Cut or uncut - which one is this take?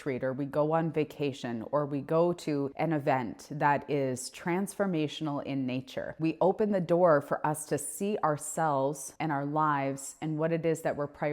cut